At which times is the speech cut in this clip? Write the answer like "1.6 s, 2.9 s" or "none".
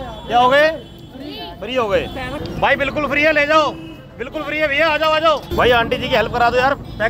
2.4 s, 5.5 s